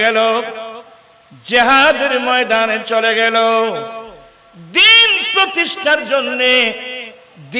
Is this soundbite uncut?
yes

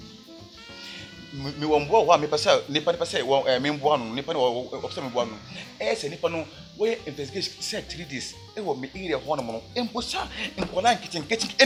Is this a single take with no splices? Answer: yes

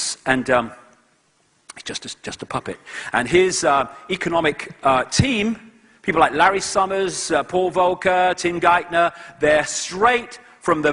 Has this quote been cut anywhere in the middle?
no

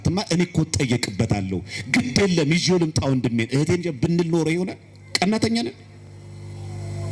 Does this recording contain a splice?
no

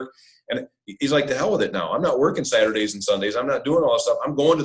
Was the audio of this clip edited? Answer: no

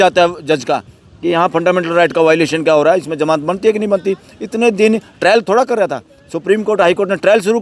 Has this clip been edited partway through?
no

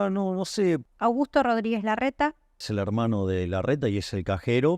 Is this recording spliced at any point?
yes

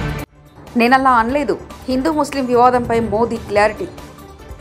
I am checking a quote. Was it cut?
no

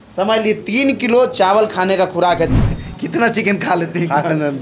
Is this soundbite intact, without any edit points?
no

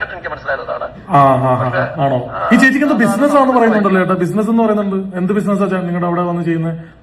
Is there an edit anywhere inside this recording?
yes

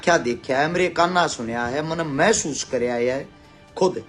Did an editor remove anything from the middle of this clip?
no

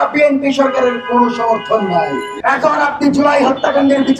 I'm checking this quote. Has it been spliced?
yes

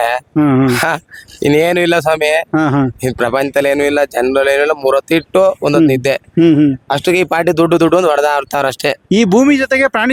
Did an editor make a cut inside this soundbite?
no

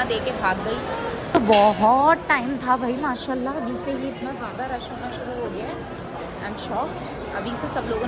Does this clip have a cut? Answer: yes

